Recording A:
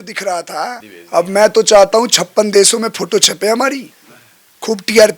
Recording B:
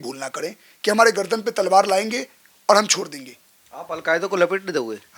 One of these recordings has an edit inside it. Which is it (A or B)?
A